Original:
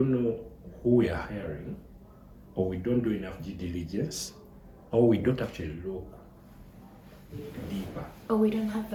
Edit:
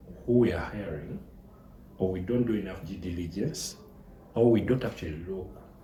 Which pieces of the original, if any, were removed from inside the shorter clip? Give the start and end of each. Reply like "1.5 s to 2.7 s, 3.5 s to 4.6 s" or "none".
none